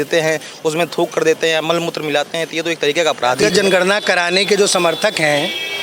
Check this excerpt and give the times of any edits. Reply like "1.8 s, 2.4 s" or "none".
3.4 s